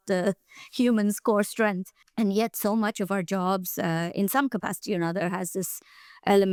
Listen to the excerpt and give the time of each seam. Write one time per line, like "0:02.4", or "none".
none